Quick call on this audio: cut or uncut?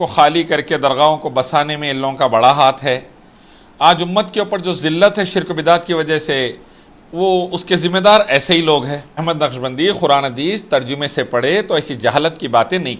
cut